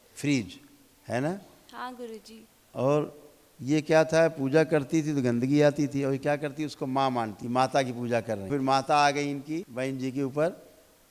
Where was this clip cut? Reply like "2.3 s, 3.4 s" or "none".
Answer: 7.4 s, 8.5 s, 9.7 s